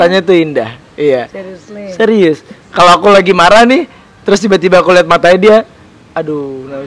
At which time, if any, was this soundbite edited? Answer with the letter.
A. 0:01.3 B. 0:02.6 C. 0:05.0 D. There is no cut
B